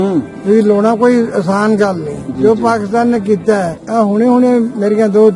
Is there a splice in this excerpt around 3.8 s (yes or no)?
yes